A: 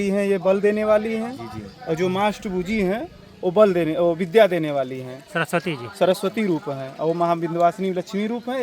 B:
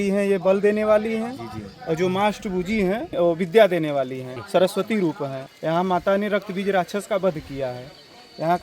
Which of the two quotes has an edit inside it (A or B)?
B